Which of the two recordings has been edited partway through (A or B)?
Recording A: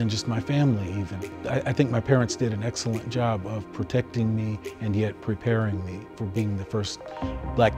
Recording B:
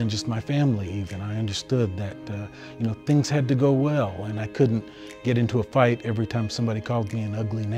A